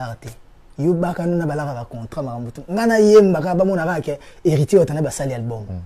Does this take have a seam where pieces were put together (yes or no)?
no